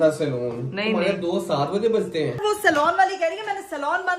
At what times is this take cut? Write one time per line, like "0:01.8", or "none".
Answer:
0:02.4